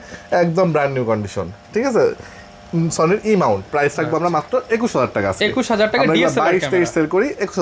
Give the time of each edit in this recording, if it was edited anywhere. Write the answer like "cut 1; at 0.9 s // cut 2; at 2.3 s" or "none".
none